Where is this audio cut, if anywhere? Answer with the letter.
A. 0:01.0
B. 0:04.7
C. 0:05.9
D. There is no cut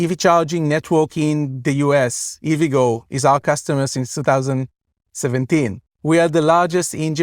C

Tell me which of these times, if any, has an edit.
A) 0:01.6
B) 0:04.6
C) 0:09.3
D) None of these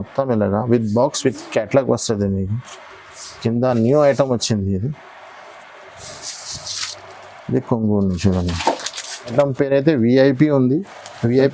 C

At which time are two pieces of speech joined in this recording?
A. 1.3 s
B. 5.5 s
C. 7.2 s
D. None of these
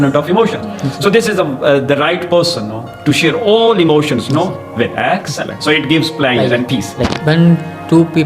C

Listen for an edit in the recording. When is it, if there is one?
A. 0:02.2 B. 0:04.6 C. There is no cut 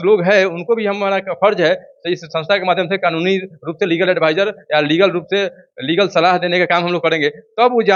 C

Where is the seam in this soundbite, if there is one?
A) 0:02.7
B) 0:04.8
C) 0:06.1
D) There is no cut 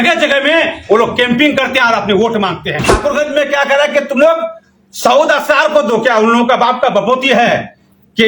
A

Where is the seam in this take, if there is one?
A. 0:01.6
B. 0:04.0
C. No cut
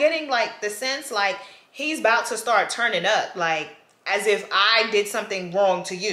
C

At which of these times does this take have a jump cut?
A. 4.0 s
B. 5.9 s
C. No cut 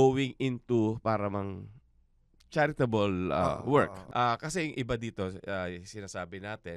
A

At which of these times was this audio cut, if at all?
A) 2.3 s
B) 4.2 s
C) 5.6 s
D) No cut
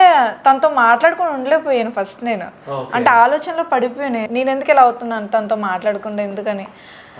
B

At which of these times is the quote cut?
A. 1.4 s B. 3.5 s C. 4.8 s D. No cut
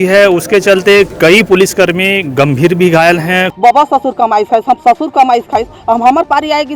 B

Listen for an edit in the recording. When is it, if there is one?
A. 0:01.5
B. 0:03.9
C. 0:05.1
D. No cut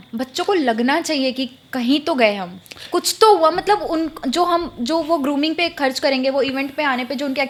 D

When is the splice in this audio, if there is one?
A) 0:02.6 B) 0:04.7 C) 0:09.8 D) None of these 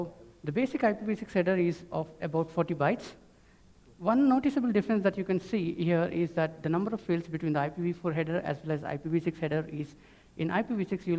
D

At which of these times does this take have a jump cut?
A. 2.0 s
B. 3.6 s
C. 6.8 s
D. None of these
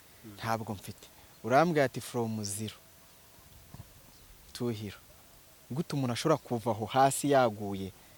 D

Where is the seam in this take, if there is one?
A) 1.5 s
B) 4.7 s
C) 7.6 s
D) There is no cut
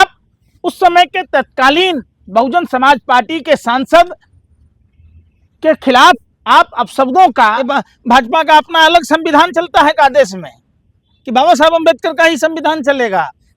C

